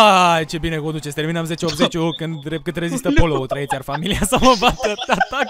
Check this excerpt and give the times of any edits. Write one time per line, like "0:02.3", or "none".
none

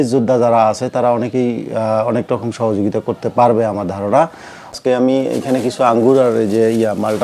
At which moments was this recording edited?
0:04.7

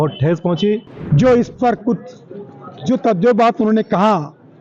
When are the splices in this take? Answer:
0:00.9

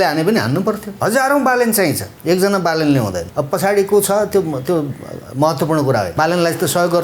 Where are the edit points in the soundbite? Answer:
0:00.9
0:02.1
0:03.2
0:06.1

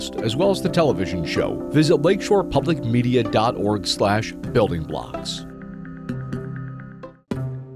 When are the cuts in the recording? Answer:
0:06.8

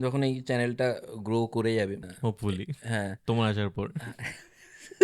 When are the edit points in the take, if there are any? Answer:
0:02.1

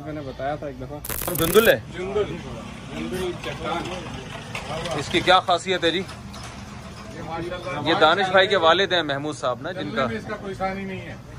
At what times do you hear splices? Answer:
0:01.3

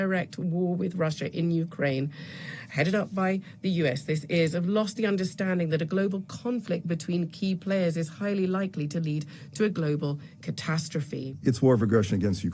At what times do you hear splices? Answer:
0:11.2

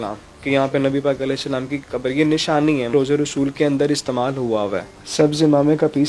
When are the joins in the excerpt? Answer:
0:02.9
0:04.9

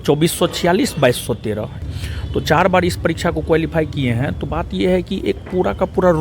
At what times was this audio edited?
0:01.8

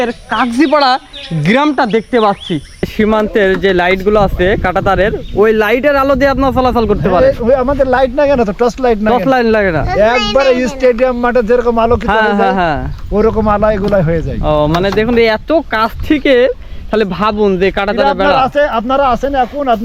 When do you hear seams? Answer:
0:02.9

